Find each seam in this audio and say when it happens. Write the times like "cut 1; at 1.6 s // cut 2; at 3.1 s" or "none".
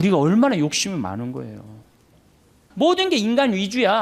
cut 1; at 2.6 s